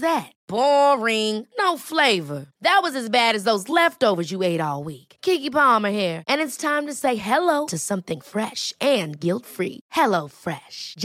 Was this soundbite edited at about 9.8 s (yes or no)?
no